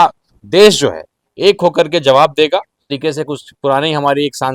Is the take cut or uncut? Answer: cut